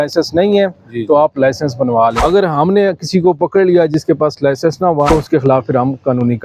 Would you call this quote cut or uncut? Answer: cut